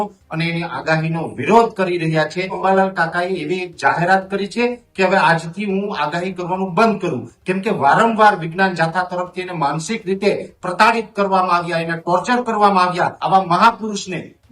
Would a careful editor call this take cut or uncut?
cut